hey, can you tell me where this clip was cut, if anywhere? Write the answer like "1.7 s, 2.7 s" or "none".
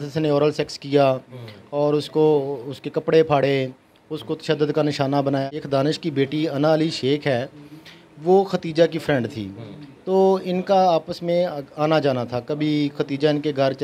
5.4 s